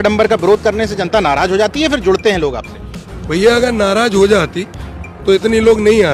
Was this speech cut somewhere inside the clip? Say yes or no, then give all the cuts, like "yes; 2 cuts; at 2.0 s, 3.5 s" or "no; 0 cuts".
no; 0 cuts